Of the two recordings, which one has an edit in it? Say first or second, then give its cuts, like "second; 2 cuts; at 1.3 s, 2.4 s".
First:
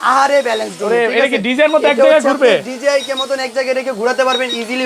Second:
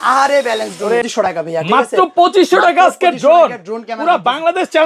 second; 1 cut; at 1.0 s